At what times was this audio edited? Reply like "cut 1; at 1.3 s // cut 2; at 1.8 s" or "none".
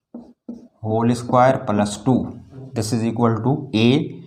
cut 1; at 2.7 s